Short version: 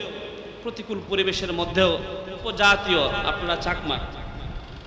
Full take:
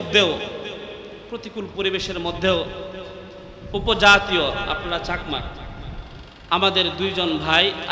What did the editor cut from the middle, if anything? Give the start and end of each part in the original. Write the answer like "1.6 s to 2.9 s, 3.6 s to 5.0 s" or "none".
3.1 s to 3.9 s